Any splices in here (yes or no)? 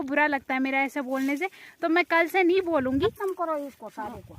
yes